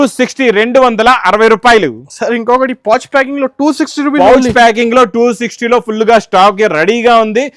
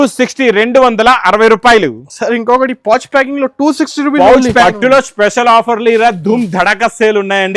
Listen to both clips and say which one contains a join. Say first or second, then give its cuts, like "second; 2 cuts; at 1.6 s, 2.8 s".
second; 1 cut; at 4.6 s